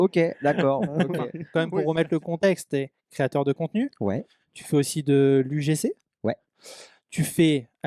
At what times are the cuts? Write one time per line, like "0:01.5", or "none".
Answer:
0:01.4